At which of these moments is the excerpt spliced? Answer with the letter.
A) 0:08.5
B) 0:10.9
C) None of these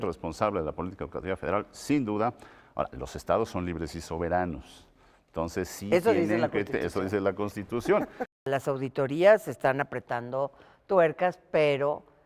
A